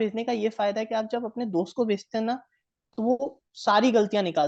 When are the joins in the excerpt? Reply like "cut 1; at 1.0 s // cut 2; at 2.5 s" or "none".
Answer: none